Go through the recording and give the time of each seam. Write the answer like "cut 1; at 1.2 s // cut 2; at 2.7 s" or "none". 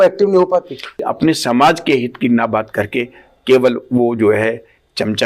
cut 1; at 1.0 s